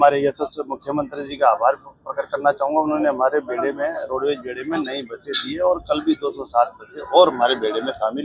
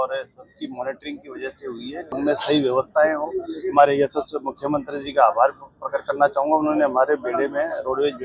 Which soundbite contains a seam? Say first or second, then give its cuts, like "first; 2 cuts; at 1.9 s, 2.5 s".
second; 1 cut; at 2.1 s